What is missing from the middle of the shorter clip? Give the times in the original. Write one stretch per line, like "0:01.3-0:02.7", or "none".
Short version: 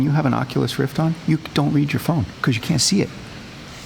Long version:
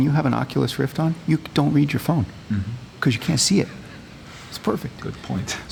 0:02.3-0:02.9